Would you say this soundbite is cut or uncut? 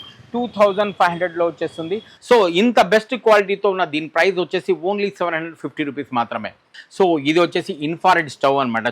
cut